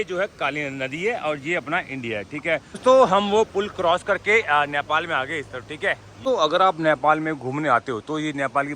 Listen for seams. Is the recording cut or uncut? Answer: cut